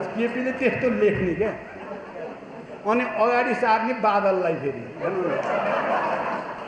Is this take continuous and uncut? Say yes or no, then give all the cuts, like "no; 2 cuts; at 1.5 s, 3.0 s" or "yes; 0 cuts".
yes; 0 cuts